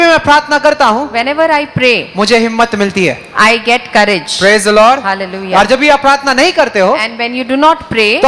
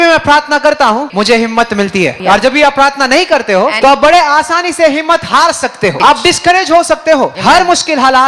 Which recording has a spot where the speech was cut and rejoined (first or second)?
second